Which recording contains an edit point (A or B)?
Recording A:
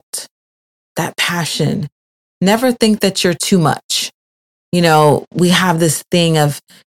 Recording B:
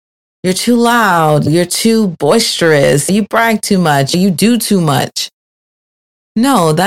B